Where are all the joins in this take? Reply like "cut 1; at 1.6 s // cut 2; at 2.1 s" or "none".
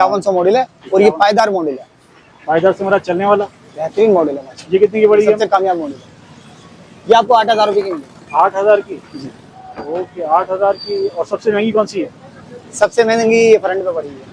none